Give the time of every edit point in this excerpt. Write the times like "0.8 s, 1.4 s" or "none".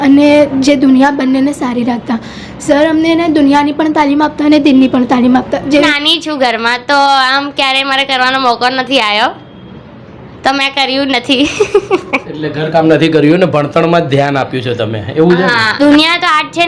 5.9 s, 15.7 s